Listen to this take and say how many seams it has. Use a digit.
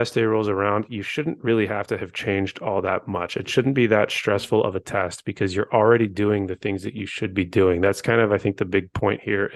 0